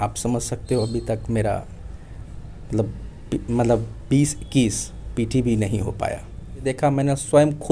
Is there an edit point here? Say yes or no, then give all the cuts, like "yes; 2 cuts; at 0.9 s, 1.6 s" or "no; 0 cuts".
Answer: yes; 1 cut; at 6.7 s